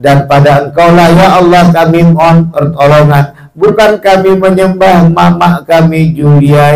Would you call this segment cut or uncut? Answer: uncut